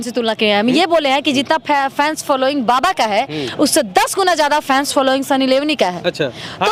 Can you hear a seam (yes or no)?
no